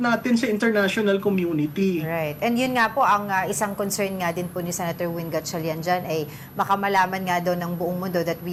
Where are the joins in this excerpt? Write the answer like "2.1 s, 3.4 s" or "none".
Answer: none